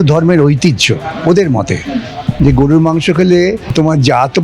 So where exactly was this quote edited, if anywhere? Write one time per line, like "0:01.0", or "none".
0:02.3
0:03.7